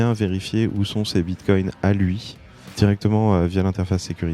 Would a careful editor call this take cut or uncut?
cut